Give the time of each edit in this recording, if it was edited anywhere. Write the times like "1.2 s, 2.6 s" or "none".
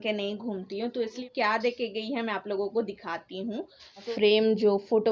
1.3 s, 4.1 s